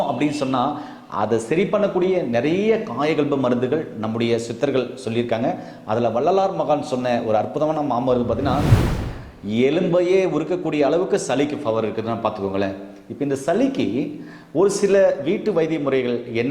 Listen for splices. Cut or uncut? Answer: cut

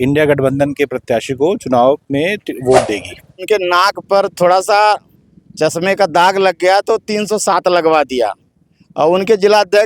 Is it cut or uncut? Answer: cut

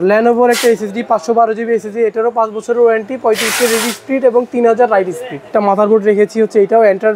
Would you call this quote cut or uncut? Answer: cut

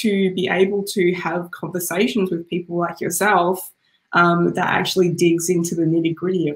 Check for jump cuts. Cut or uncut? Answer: uncut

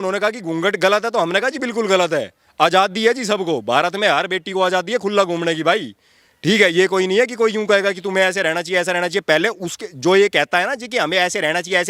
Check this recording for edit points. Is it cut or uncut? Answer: uncut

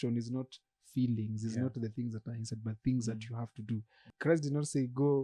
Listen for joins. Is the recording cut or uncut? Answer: cut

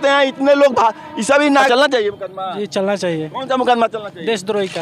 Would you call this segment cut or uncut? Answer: cut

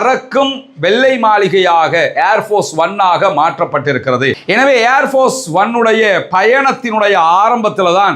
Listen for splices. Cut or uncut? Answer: uncut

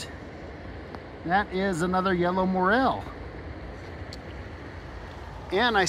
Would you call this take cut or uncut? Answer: uncut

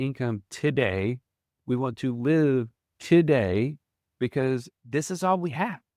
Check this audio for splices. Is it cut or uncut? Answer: uncut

